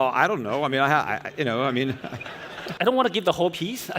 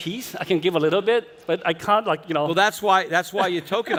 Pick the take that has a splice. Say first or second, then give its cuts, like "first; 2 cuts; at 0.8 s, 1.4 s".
first; 1 cut; at 2.6 s